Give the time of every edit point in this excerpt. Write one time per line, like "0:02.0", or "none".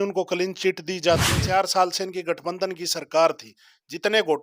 0:01.4